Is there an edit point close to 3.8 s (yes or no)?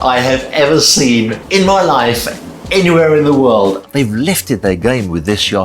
yes